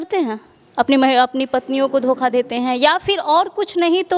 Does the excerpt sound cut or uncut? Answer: uncut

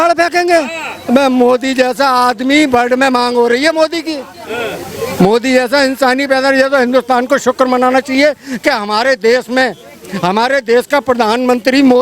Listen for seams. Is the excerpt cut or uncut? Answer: uncut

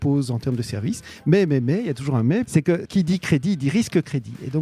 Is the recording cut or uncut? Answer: cut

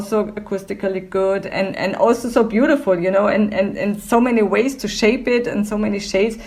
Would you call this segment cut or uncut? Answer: uncut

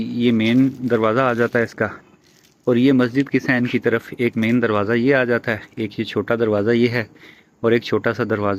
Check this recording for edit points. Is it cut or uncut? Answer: uncut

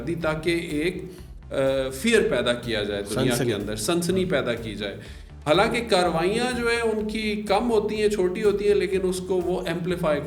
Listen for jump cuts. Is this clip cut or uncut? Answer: uncut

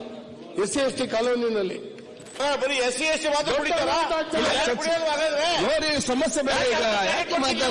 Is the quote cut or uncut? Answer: cut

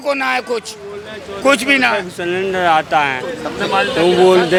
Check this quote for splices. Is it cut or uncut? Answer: uncut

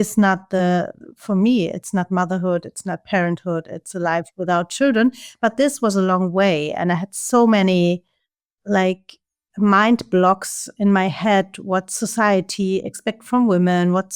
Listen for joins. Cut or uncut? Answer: uncut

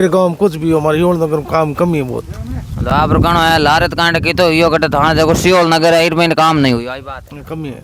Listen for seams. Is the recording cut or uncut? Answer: uncut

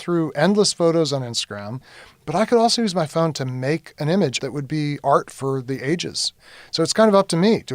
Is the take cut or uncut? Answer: cut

